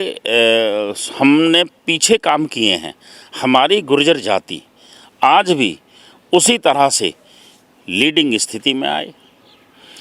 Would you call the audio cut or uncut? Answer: uncut